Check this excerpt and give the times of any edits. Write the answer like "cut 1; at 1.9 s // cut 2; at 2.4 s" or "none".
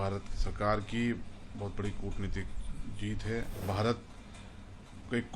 cut 1; at 3.6 s